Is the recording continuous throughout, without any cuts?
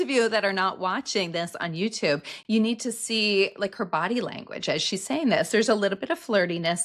yes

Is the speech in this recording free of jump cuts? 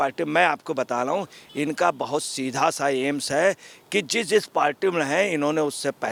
yes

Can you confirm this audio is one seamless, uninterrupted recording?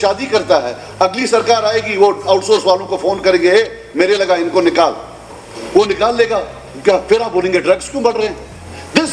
yes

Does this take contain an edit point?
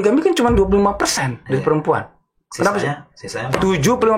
no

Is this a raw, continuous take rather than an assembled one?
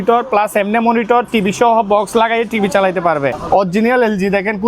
no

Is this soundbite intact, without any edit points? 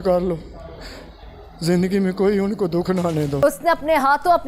no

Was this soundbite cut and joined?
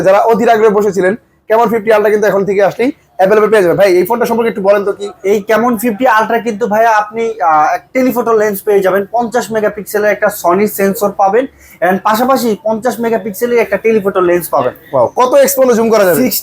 no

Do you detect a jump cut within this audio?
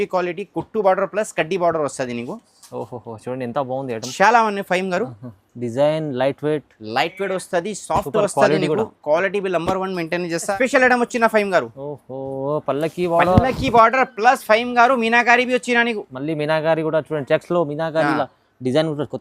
yes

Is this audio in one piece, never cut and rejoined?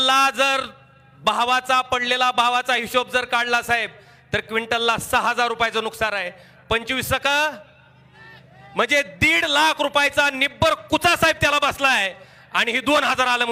yes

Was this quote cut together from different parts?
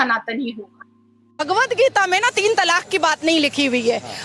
yes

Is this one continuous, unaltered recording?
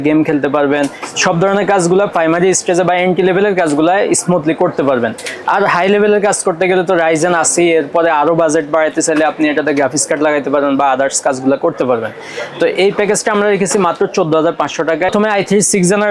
no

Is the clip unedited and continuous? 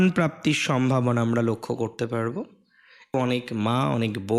no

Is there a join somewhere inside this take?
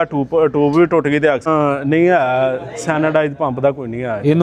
yes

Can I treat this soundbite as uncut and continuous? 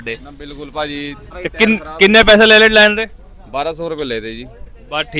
no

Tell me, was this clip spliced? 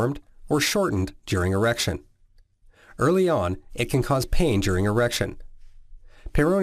yes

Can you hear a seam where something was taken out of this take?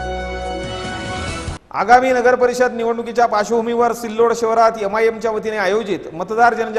yes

